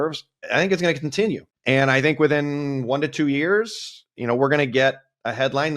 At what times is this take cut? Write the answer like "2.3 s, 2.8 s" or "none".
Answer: 1.5 s